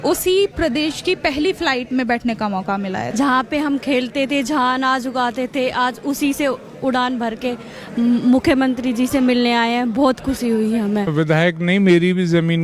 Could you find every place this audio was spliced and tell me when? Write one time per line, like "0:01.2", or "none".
0:03.0
0:11.1